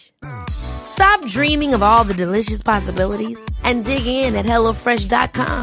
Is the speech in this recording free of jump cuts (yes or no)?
yes